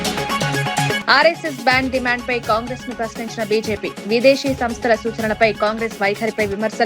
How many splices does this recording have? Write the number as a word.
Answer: one